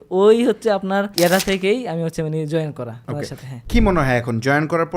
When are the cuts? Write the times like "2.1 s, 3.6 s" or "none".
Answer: 1.1 s, 3.2 s